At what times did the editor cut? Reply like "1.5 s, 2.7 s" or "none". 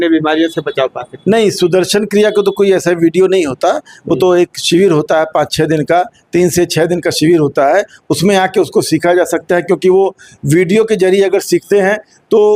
none